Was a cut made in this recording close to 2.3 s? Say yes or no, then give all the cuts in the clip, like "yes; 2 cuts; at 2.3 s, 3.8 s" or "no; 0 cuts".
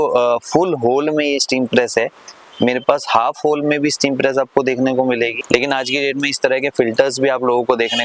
no; 1 cut; at 5.4 s